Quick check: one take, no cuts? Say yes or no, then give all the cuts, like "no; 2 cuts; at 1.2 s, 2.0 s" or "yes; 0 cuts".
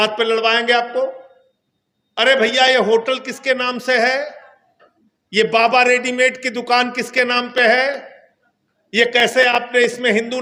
yes; 0 cuts